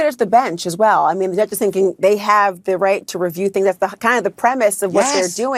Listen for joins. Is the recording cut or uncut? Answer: uncut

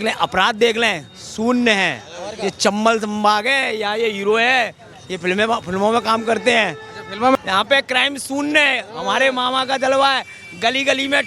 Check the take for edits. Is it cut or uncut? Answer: cut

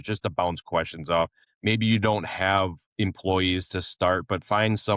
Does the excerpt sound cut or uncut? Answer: cut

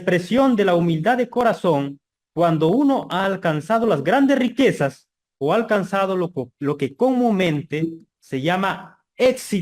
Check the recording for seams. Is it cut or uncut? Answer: uncut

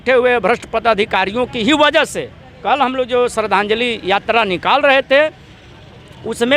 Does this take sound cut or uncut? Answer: uncut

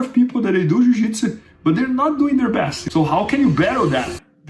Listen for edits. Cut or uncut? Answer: cut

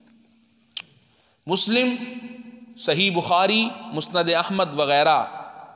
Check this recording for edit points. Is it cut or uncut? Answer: uncut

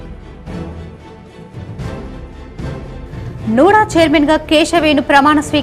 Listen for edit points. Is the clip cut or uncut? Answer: cut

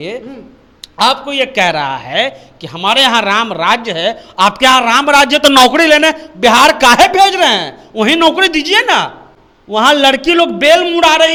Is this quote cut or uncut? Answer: uncut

